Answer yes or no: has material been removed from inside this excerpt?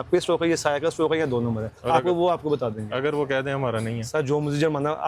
no